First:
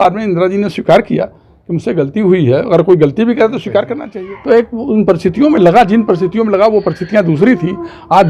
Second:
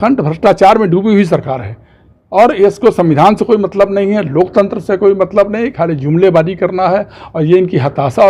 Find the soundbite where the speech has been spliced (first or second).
first